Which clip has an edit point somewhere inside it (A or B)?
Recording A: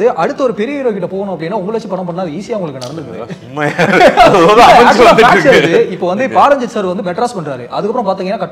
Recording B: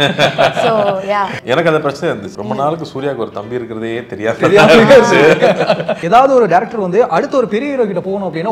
B